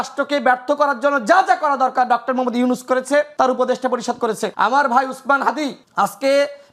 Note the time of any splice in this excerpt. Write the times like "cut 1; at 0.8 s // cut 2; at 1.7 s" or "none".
cut 1; at 3.3 s // cut 2; at 4.5 s // cut 3; at 5.8 s

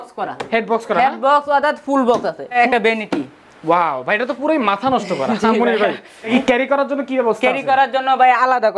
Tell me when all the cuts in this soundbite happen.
cut 1; at 2.6 s // cut 2; at 6.3 s

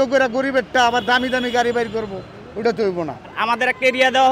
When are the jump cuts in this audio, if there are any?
cut 1; at 3.4 s

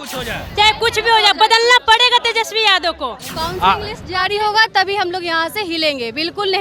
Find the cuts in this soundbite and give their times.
cut 1; at 3.3 s

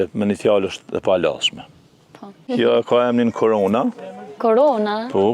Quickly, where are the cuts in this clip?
cut 1; at 2.5 s

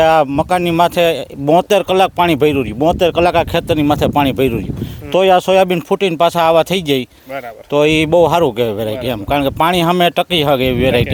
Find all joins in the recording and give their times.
none

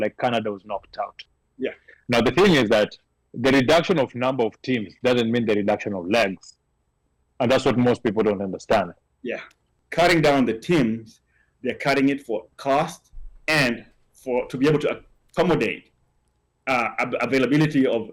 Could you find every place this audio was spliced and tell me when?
cut 1; at 9.7 s

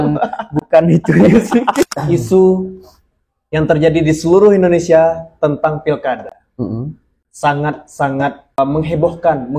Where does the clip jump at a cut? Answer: cut 1; at 1.8 s // cut 2; at 8.6 s

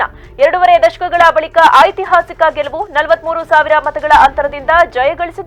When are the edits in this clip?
none

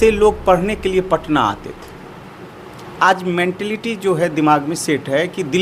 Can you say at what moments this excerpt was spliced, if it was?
none

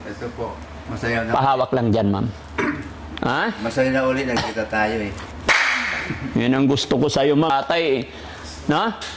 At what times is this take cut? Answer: cut 1; at 7.5 s

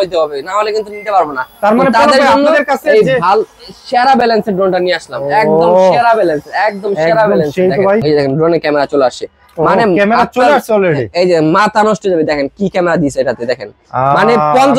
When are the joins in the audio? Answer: cut 1; at 8.0 s

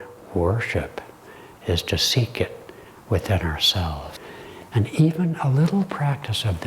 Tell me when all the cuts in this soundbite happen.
cut 1; at 4.2 s

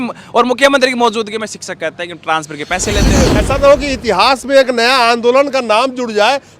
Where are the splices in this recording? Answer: cut 1; at 3.4 s

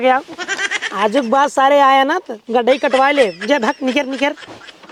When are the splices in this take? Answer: none

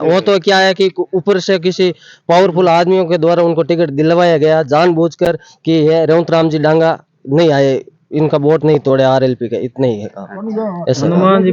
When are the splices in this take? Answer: none

